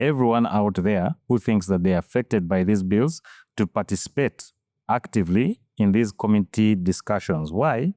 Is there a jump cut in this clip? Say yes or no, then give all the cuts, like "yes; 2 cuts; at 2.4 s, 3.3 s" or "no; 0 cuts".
no; 0 cuts